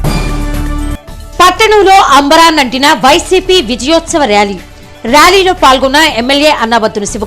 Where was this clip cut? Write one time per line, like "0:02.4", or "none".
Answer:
0:01.1